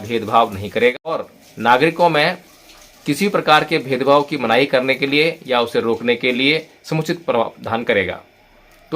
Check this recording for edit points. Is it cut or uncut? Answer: cut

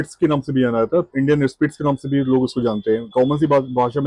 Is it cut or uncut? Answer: cut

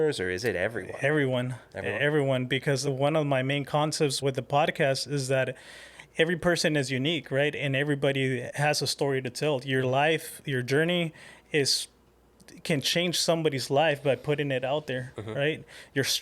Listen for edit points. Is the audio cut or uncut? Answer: cut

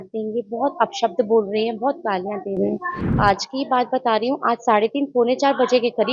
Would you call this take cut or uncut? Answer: uncut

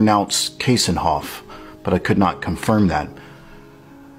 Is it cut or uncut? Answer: cut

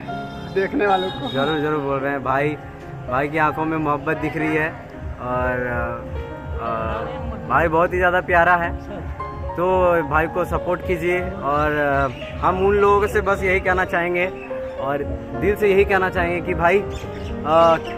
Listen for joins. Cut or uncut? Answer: uncut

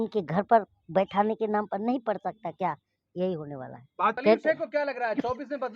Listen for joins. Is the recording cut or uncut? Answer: cut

